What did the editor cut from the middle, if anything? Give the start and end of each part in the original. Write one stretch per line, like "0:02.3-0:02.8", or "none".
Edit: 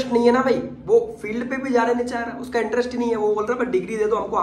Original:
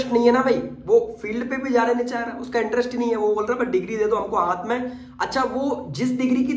none